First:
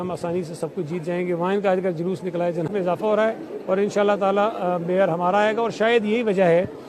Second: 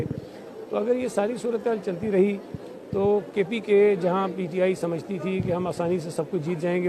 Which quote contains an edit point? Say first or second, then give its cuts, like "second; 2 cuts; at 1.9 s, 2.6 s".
first; 1 cut; at 2.7 s